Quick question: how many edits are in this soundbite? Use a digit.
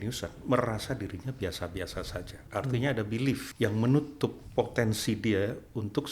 3